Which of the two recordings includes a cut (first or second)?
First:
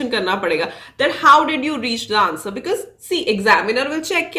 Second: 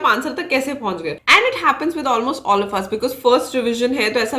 second